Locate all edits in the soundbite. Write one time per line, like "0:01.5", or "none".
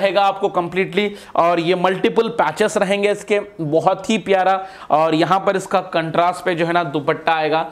none